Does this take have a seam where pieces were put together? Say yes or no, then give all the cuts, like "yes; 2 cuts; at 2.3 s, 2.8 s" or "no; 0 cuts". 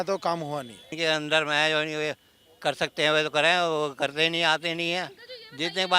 yes; 1 cut; at 0.9 s